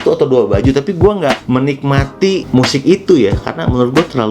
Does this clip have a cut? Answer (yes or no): yes